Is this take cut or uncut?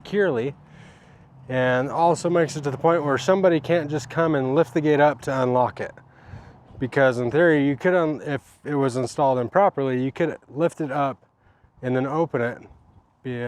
uncut